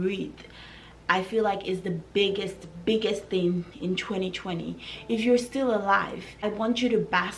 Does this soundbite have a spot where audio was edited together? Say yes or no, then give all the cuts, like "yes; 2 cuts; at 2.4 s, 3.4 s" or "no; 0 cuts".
yes; 1 cut; at 6.4 s